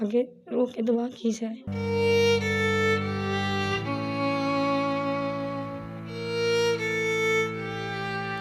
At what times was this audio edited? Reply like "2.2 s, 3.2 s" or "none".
1.6 s